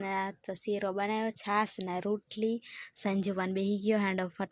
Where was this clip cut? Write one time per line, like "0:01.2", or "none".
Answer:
none